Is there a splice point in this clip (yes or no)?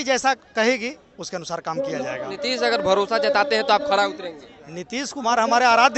no